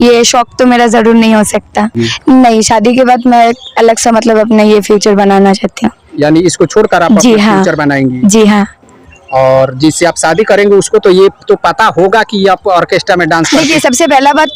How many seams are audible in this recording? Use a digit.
2